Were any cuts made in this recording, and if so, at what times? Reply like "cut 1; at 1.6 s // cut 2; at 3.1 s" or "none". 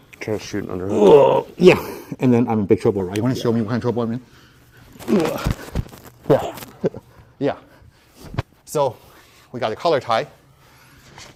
none